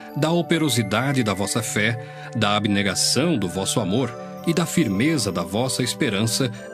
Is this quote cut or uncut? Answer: cut